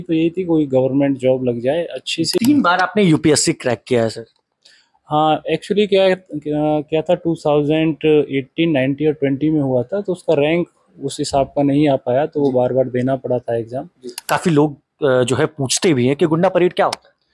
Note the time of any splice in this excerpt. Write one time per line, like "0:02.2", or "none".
0:02.4
0:14.1